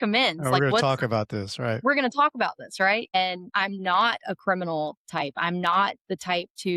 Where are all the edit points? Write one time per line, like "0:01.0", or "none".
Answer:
0:03.1